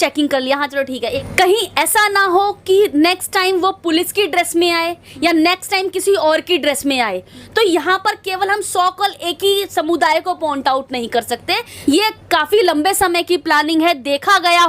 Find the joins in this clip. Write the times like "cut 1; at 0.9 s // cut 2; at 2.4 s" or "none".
cut 1; at 1.1 s // cut 2; at 11.6 s